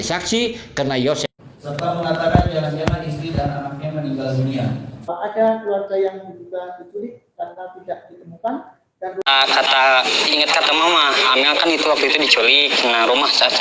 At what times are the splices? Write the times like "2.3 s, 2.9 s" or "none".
1.2 s, 5.1 s, 9.3 s